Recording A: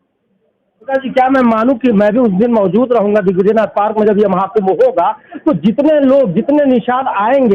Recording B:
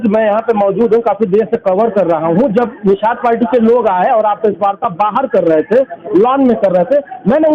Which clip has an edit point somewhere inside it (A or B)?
A